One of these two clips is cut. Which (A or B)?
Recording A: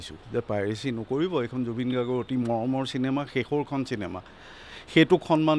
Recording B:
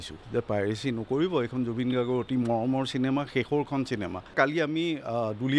B